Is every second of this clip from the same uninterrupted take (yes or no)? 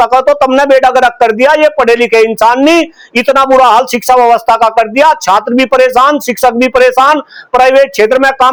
yes